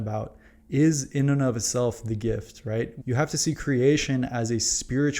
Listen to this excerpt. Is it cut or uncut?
cut